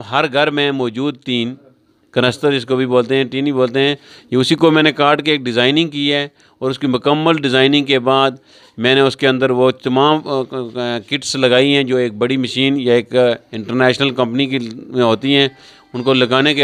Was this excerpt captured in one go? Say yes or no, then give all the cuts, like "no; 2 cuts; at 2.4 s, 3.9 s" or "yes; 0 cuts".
yes; 0 cuts